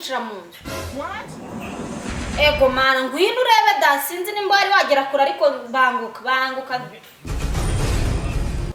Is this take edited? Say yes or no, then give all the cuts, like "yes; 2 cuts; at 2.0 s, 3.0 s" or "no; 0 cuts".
no; 0 cuts